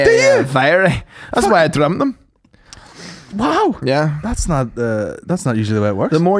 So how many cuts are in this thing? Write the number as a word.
zero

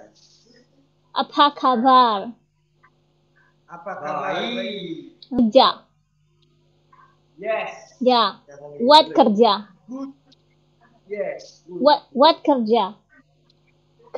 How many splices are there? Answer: one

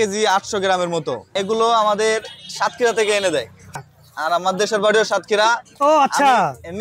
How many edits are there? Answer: two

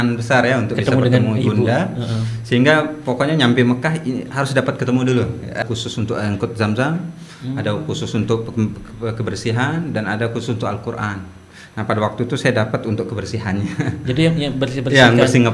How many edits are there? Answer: one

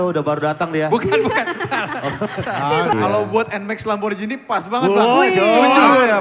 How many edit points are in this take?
one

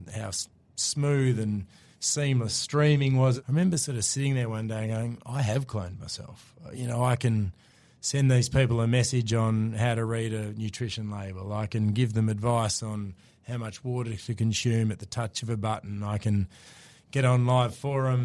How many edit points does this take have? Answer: one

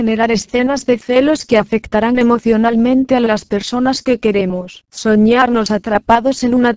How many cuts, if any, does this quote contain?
one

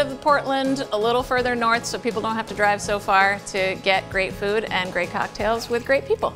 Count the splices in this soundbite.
zero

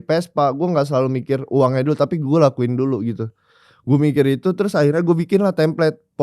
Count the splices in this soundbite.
zero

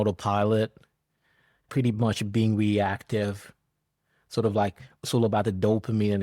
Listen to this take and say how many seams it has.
one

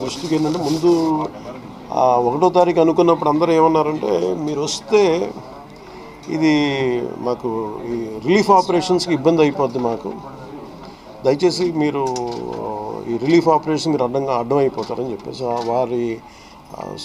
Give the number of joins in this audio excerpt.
zero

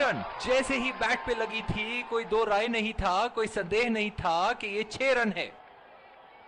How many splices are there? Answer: one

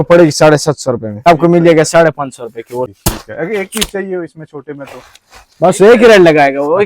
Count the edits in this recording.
two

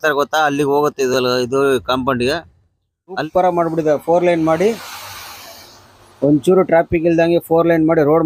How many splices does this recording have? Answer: one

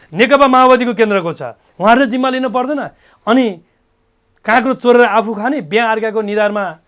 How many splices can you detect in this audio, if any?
zero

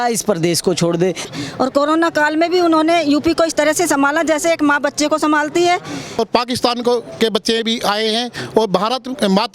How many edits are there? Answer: two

